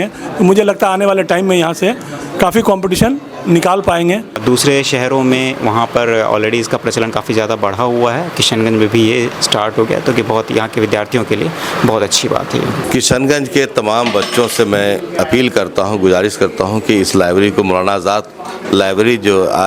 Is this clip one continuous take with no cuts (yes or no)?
no